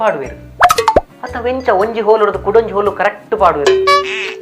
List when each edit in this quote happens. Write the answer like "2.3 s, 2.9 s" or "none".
none